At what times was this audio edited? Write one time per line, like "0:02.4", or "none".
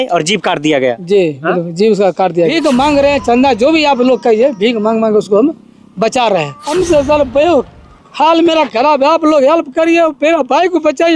0:02.5
0:06.6